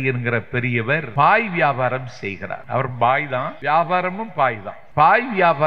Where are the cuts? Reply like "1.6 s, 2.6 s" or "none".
1.1 s, 2.5 s, 3.5 s, 4.7 s